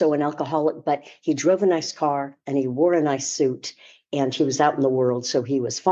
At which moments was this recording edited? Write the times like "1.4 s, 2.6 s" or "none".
none